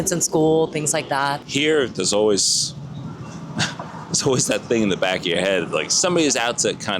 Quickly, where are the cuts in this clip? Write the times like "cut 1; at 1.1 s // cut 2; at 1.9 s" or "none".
cut 1; at 1.4 s // cut 2; at 5.9 s